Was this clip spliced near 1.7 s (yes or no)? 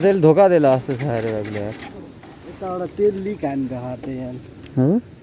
no